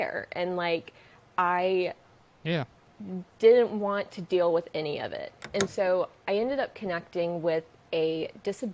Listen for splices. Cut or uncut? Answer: cut